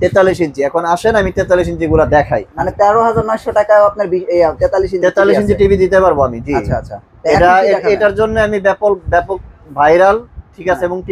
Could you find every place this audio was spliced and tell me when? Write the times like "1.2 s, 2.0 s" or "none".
2.6 s

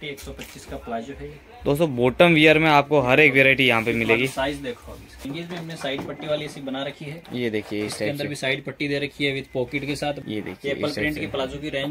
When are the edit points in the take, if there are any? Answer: 5.2 s, 10.2 s

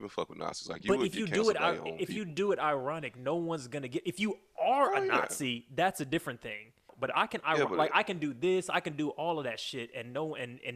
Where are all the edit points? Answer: 6.8 s

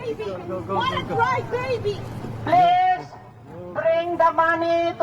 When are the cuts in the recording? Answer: 1.2 s, 3.3 s

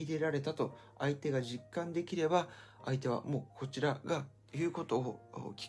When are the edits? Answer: none

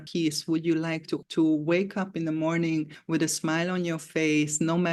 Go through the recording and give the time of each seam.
none

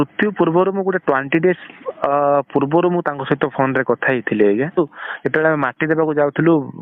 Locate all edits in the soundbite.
4.7 s

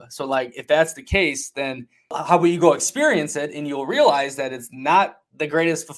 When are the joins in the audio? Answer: 2.2 s

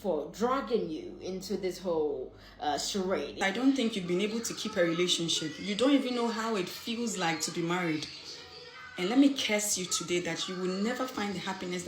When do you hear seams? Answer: 3.4 s

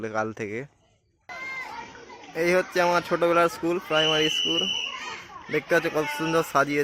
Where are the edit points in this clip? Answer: 1.3 s

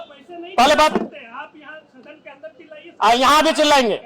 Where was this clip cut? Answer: none

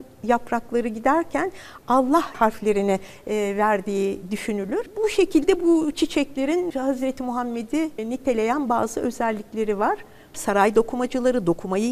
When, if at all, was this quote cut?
2.3 s, 4.9 s, 6.7 s, 8.0 s, 10.4 s

